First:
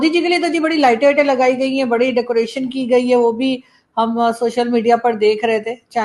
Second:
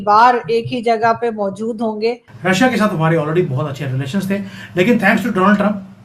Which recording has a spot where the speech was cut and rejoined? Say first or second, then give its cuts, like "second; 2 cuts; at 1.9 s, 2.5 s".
second; 1 cut; at 2.3 s